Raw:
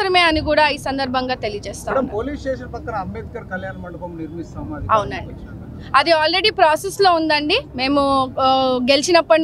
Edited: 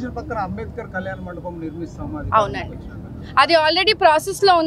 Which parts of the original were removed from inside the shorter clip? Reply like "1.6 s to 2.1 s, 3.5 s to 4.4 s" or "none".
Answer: none